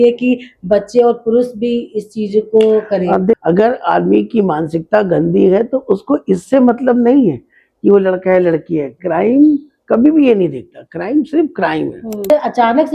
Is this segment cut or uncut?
cut